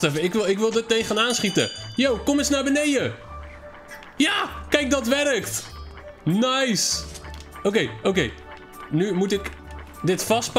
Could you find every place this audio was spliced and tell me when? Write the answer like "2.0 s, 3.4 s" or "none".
none